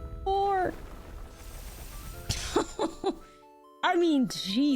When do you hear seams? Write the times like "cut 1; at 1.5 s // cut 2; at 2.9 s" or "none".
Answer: cut 1; at 1.2 s